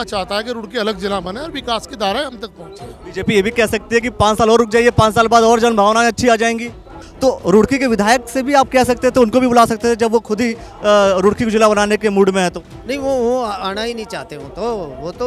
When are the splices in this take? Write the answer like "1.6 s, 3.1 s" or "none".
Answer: 7.0 s